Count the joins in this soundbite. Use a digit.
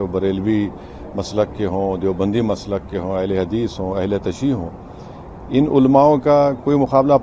0